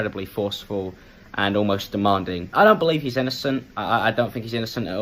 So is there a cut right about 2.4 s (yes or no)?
yes